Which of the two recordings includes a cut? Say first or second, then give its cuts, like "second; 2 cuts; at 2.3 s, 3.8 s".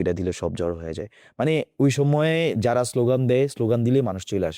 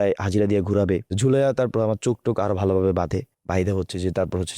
second; 2 cuts; at 1.1 s, 3.4 s